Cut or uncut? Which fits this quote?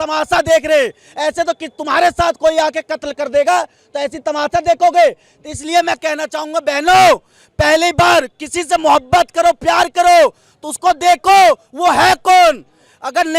uncut